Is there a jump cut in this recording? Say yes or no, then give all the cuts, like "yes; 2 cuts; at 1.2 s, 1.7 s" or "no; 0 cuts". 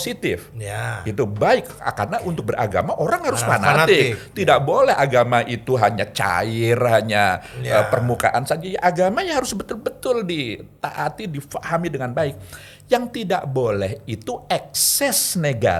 no; 0 cuts